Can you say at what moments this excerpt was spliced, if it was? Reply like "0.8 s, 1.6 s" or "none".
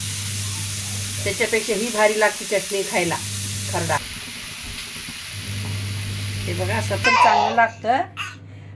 7.0 s